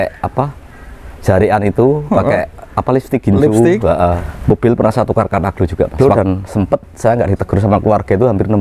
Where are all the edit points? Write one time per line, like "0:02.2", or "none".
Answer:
0:04.3
0:05.9